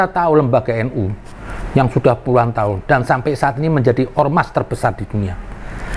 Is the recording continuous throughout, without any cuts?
yes; 0 cuts

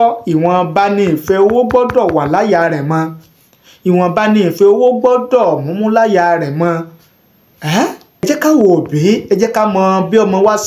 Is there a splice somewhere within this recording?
yes; 1 cut; at 8.2 s

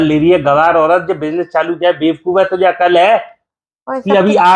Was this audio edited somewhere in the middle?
no; 0 cuts

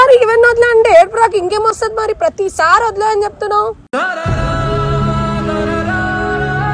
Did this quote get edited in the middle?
no; 0 cuts

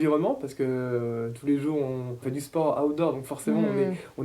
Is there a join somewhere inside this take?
yes; 1 cut; at 2.2 s

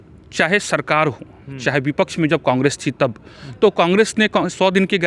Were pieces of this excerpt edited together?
no; 0 cuts

